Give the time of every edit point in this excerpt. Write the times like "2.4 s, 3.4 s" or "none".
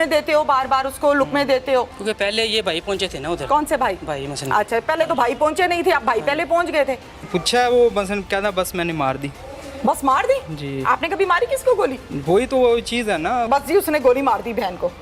2.0 s, 7.2 s, 13.5 s